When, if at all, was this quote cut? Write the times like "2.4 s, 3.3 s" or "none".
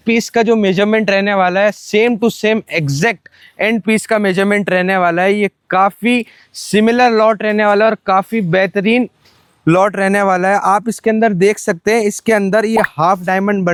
none